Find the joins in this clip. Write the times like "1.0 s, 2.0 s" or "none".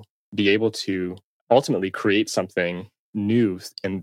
1.3 s, 3.1 s

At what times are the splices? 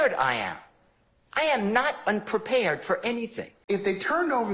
3.5 s

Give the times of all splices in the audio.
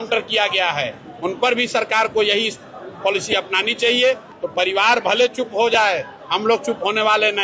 4.3 s

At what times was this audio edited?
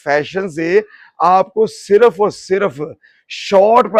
none

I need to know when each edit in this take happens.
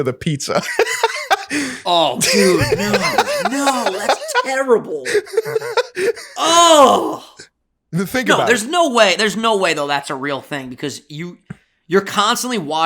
none

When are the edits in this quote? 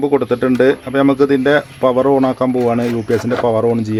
none

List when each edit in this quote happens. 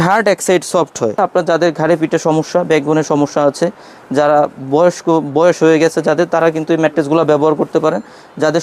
1.2 s

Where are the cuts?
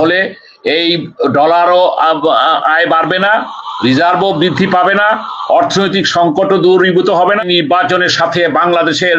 7.4 s

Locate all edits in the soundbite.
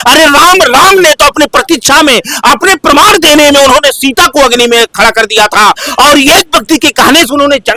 none

